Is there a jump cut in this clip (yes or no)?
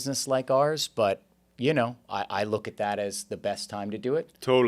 no